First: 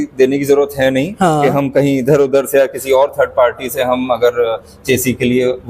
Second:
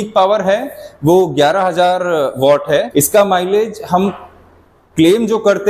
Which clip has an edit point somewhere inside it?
second; 1 cut; at 2.9 s

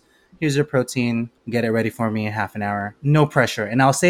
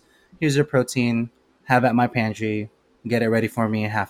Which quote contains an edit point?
first; 2 cuts; at 1.4 s, 2.9 s

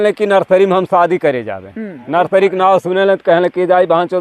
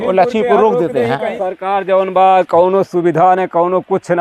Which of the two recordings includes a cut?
second; 1 cut; at 1.4 s

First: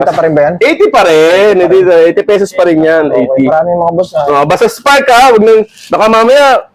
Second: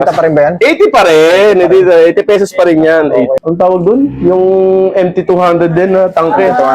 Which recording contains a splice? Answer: second; 1 cut; at 3.4 s

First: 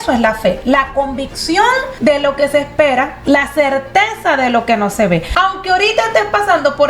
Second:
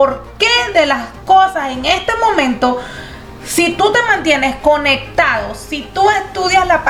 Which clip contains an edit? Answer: first; 3 cuts; at 1.9 s, 3.1 s, 5.3 s

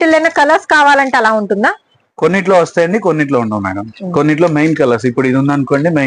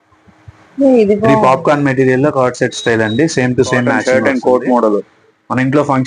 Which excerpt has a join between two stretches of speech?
second; 2 cuts; at 1.3 s, 4.0 s

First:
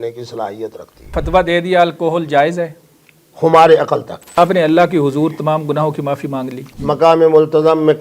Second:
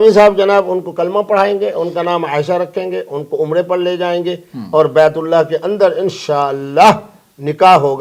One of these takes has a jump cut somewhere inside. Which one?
first; 3 cuts; at 1.2 s, 4.4 s, 6.7 s

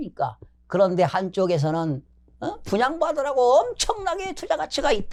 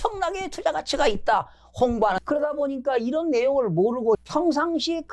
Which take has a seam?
second; 2 cuts; at 2.2 s, 4.3 s

